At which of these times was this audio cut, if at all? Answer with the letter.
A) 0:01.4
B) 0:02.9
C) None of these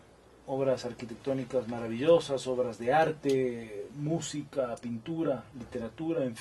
A